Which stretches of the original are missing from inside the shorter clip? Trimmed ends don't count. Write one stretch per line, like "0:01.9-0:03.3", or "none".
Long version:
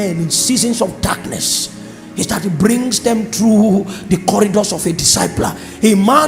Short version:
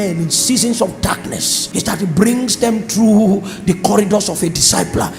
0:01.5-0:02.0